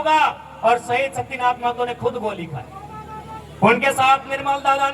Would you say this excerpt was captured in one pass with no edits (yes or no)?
yes